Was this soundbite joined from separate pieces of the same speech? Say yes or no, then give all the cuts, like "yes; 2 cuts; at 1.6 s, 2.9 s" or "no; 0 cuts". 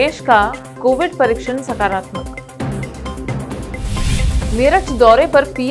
no; 0 cuts